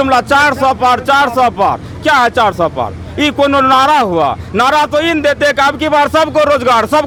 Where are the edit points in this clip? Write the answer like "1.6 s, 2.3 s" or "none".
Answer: none